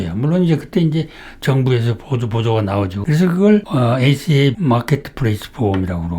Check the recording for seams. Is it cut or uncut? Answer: cut